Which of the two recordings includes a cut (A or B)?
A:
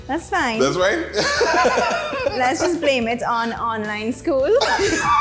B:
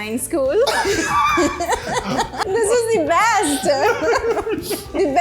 B